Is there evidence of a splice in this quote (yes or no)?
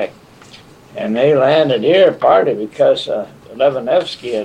yes